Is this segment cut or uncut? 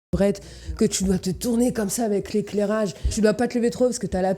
cut